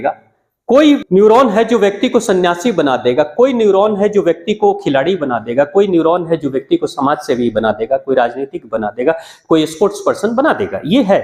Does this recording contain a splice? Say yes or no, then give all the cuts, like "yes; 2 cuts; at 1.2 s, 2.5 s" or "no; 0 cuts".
yes; 1 cut; at 1.0 s